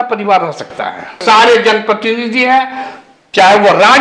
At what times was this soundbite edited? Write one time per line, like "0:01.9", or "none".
0:01.2